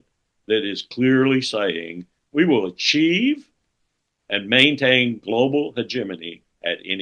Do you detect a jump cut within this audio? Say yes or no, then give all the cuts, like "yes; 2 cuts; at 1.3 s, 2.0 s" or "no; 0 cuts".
yes; 1 cut; at 2.2 s